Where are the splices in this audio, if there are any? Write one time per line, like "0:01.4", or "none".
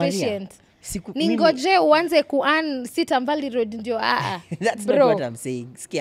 none